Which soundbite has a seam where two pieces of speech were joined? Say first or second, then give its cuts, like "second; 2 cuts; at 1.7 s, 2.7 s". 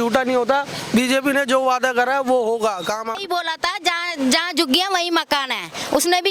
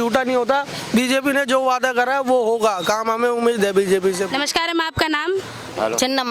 first; 1 cut; at 3.2 s